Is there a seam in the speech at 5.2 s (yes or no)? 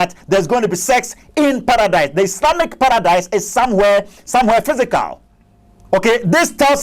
no